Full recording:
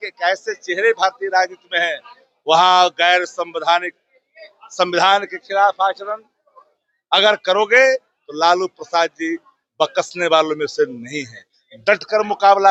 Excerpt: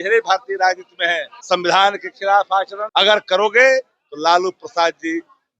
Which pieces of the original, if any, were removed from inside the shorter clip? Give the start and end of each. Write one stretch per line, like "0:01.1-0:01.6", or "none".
0:02.0-0:04.6
0:06.1-0:07.0